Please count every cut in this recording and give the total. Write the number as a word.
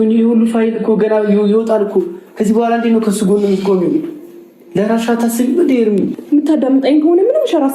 one